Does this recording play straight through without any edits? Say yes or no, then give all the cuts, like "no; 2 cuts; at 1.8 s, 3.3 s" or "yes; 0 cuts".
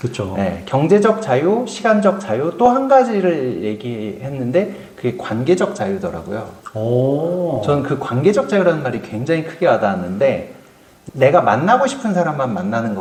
yes; 0 cuts